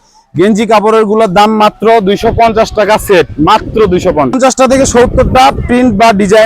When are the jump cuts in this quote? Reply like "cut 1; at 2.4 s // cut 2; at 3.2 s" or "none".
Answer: cut 1; at 4.3 s

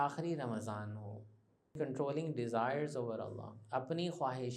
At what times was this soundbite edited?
cut 1; at 1.8 s

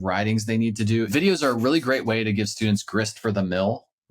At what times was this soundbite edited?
cut 1; at 1.1 s

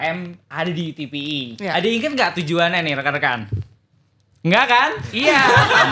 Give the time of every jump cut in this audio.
none

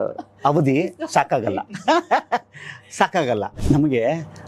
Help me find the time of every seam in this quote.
cut 1; at 3.6 s

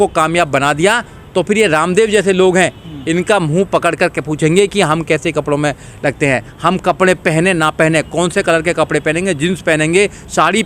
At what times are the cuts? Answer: none

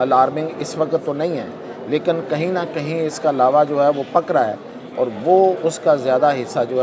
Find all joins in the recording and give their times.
none

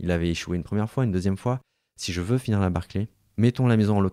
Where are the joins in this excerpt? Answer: cut 1; at 3.2 s

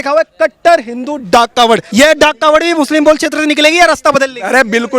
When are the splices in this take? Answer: cut 1; at 1.9 s

